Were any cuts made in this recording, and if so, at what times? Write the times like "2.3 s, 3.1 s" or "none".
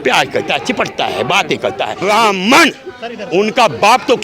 1.9 s